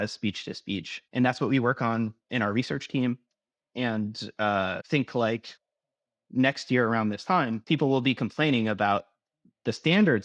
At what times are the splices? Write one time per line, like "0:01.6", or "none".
0:01.0
0:07.6